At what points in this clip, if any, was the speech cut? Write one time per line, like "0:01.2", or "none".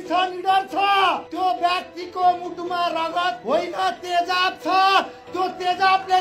0:01.3
0:03.4